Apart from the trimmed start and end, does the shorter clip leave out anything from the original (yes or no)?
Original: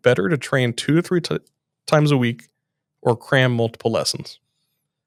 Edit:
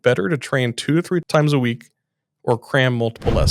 yes